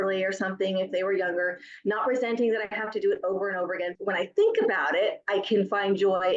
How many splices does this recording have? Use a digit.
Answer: 1